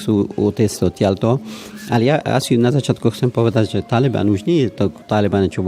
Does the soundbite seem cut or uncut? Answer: uncut